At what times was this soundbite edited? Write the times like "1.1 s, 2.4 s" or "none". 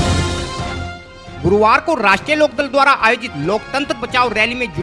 1.0 s